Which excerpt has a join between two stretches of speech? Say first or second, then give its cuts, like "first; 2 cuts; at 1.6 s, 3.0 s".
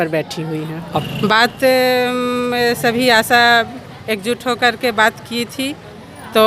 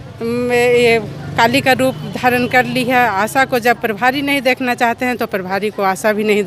first; 1 cut; at 1.0 s